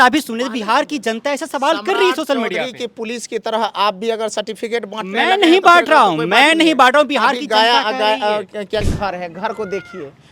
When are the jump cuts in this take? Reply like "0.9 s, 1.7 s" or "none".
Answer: 8.9 s